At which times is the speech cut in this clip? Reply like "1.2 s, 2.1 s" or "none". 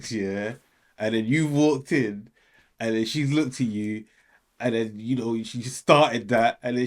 none

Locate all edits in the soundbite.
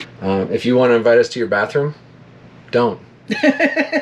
none

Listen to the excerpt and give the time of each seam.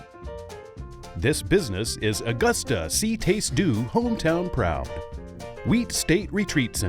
1.1 s

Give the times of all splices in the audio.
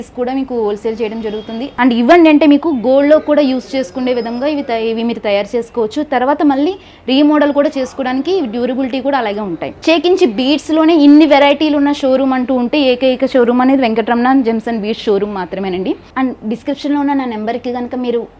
1.6 s, 9.8 s, 16.1 s

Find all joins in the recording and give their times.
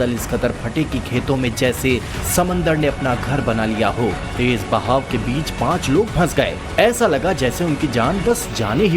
7.9 s

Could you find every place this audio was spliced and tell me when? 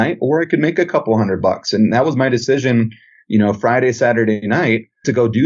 4.5 s

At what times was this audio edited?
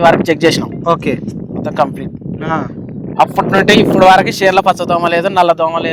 none

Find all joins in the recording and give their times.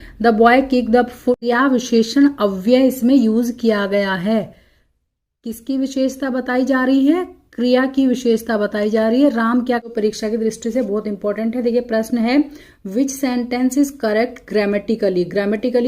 1.4 s, 9.9 s

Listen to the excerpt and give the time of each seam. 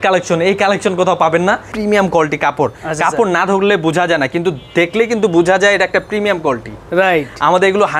1.7 s

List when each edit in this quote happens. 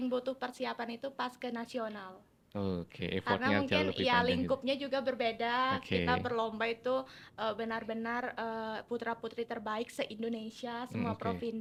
none

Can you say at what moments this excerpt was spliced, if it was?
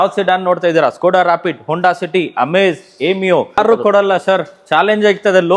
3.6 s

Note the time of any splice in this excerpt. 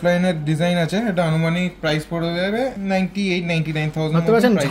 2.7 s

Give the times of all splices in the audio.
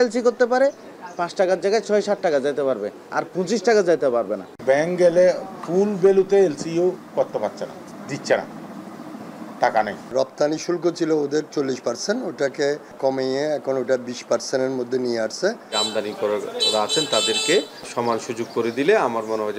4.5 s, 7.9 s, 10.1 s, 12.9 s, 15.8 s, 17.9 s

